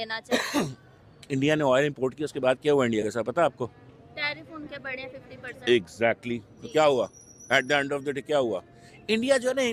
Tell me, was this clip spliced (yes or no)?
no